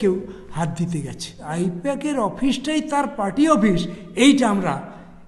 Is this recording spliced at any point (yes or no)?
yes